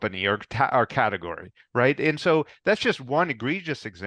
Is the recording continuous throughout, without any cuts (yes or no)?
yes